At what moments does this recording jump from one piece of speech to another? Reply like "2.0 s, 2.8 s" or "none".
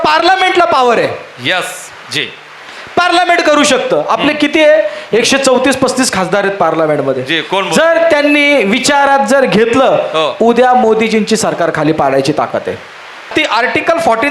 13.3 s